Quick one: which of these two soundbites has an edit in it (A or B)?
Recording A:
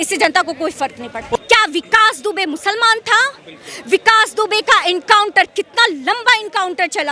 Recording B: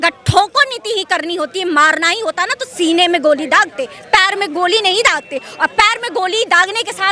A